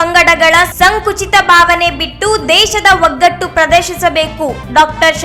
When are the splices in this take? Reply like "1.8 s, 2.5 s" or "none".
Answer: none